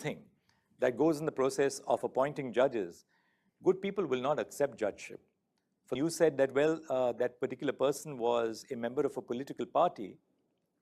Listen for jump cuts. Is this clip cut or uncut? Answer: cut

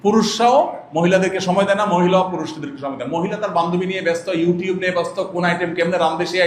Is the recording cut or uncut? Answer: uncut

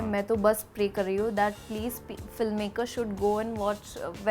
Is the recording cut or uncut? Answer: uncut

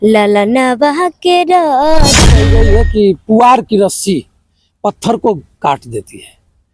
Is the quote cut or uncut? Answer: cut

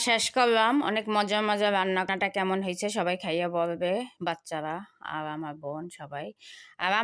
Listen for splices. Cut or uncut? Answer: cut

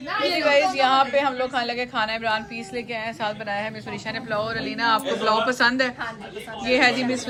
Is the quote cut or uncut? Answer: uncut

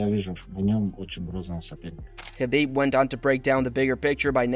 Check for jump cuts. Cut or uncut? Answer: uncut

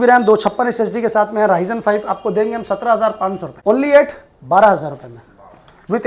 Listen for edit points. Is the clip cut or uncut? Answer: cut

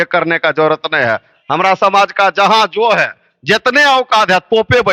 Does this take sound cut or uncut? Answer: uncut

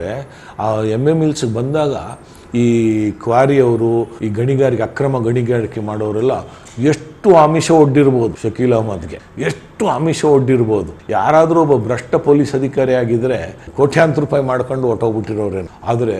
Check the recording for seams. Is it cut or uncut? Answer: uncut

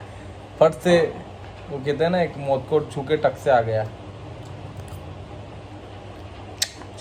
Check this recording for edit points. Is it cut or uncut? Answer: uncut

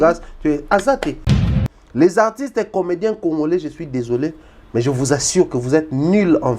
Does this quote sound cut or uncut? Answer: cut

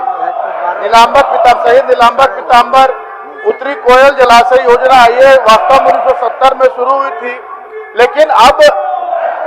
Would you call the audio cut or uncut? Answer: uncut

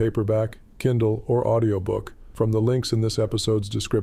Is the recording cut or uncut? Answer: cut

